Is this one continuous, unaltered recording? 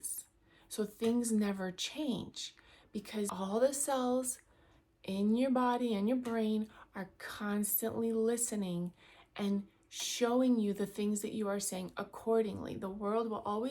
no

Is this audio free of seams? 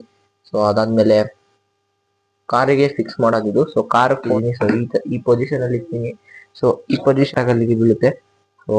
no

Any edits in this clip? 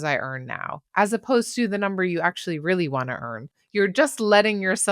yes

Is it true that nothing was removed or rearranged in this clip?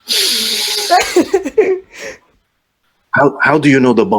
no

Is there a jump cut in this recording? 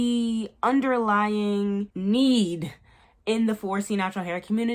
yes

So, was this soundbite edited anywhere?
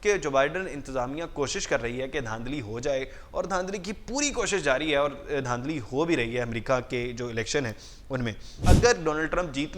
yes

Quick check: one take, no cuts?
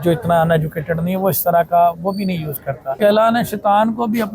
no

